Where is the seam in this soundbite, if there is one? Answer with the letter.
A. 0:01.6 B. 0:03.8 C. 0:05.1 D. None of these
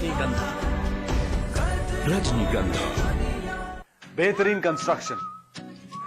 B